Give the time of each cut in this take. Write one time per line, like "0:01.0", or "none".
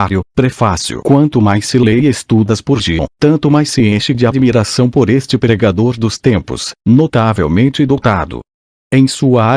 none